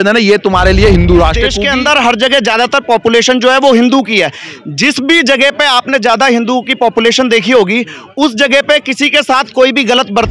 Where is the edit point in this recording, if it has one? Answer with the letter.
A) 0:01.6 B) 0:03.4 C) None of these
A